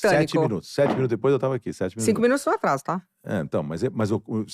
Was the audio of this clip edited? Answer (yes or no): yes